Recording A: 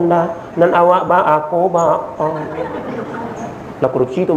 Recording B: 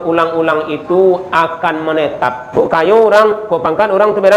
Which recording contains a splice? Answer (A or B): B